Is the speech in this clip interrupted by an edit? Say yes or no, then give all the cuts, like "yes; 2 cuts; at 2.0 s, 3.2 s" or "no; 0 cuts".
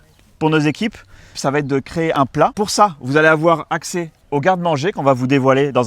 yes; 1 cut; at 2.5 s